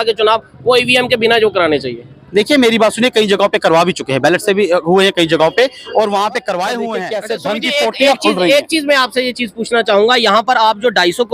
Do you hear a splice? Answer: yes; 1 cut; at 7.1 s

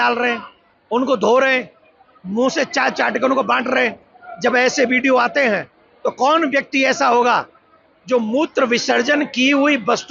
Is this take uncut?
yes; 0 cuts

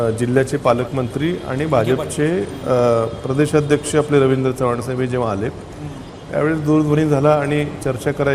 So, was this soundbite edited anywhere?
no; 0 cuts

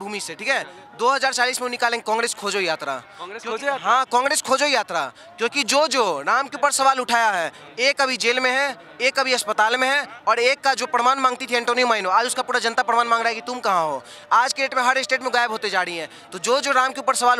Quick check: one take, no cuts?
yes; 0 cuts

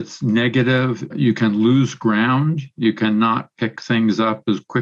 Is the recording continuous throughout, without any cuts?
no; 1 cut; at 1.0 s

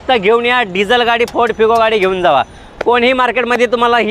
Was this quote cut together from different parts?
no; 0 cuts

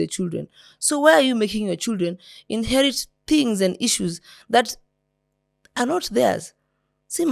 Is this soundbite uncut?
yes; 0 cuts

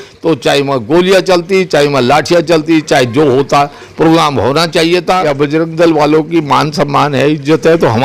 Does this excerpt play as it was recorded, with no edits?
no; 1 cut; at 5.3 s

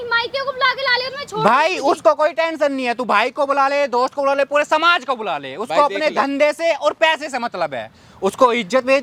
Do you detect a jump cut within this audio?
no; 0 cuts

